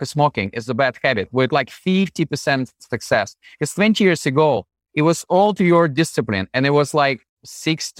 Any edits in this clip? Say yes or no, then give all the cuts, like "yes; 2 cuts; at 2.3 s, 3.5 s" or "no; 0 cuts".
no; 0 cuts